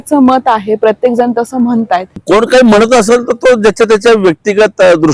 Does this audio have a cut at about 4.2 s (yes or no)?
no